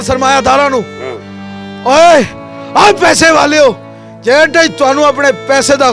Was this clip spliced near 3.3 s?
no; 0 cuts

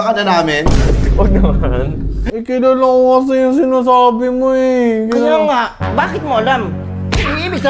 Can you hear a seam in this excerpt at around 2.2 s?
yes; 1 cut; at 2.2 s

